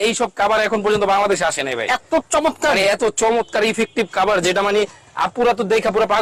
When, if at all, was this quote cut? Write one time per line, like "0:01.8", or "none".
none

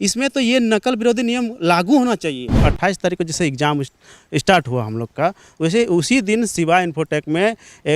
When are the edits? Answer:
0:02.6

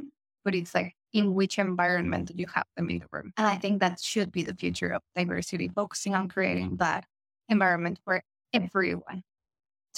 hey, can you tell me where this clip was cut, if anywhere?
0:03.2

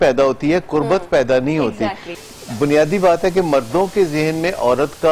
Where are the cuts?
0:02.1

